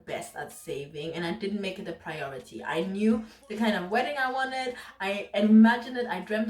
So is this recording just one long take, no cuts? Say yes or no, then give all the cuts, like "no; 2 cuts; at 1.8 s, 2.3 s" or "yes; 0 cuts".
yes; 0 cuts